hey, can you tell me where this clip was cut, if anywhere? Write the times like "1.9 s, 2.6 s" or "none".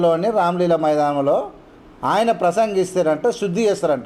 none